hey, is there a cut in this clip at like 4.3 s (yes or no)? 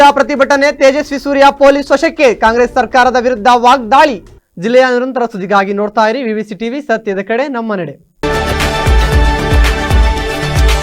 no